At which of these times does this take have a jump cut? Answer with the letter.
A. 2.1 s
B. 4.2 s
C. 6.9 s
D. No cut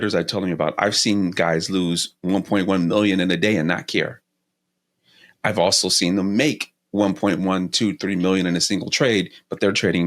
D